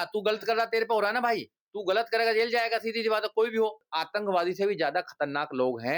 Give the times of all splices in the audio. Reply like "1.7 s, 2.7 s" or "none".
3.9 s

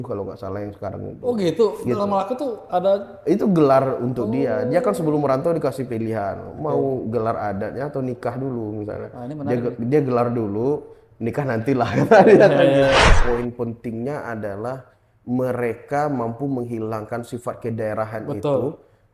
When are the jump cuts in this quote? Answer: 13.1 s

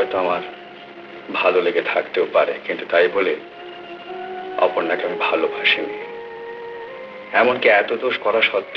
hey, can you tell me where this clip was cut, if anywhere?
none

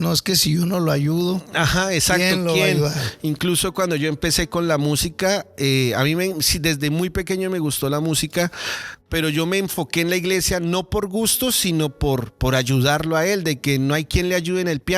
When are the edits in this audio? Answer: none

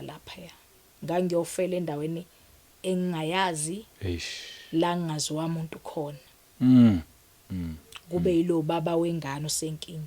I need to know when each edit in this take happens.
none

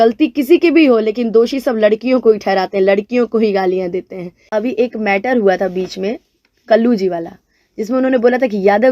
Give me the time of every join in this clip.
4.4 s

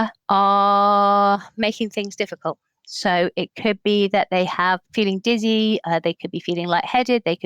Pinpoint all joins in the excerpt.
4.9 s, 5.8 s

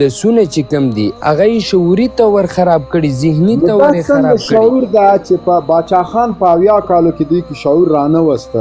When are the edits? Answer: 1.1 s

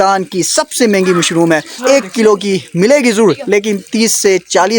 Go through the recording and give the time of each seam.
1.8 s

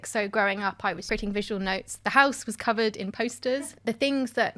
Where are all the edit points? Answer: 1.0 s, 3.6 s

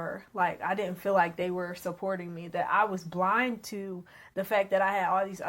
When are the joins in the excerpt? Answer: none

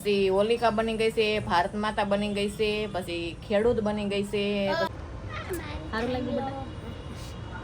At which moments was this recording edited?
4.9 s

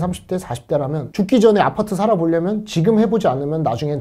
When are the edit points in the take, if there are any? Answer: none

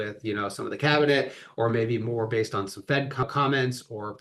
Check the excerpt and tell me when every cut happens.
3.2 s

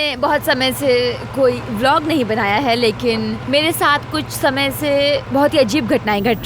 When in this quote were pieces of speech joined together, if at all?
3.4 s, 5.2 s

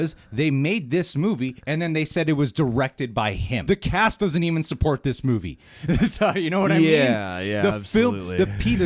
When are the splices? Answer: 3.6 s

